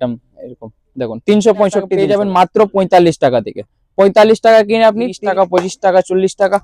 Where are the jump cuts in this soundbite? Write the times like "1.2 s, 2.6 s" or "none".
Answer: 1.9 s, 5.1 s